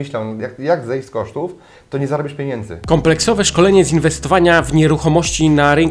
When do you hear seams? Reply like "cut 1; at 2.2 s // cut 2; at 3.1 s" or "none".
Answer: cut 1; at 2.7 s